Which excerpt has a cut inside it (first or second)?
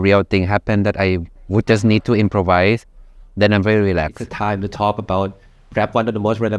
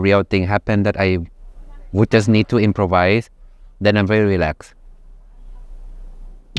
first